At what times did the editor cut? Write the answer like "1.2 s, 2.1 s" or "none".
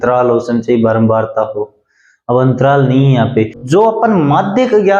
3.6 s